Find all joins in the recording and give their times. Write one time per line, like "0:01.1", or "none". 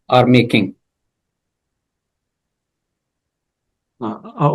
none